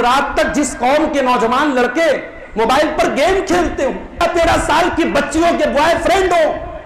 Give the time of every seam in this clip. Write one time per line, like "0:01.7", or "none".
0:04.2